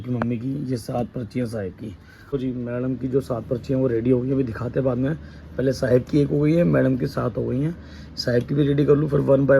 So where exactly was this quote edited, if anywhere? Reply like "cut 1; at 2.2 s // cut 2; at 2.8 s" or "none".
cut 1; at 2.1 s